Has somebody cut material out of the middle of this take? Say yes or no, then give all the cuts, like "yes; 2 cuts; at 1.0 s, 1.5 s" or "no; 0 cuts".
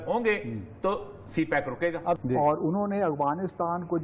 yes; 1 cut; at 2.2 s